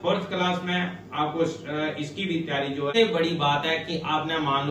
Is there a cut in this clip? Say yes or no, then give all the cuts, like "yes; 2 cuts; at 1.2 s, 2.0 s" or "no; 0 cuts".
yes; 1 cut; at 2.9 s